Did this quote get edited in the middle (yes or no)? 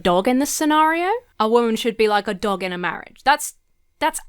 yes